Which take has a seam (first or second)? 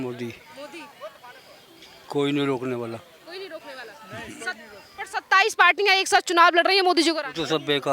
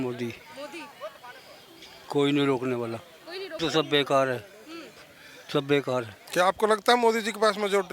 second